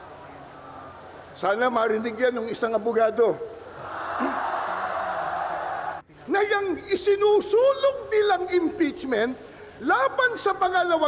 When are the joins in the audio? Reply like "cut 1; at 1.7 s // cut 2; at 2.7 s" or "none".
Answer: cut 1; at 6.0 s